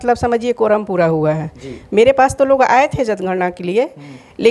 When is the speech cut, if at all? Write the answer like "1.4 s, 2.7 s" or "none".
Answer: none